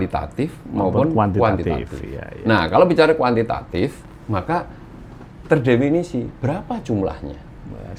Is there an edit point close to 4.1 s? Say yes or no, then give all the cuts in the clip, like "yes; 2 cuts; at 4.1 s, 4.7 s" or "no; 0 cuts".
no; 0 cuts